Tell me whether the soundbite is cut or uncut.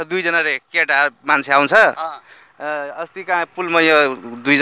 uncut